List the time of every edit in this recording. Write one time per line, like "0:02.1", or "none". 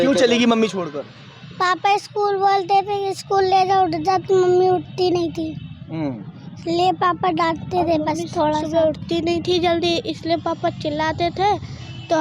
none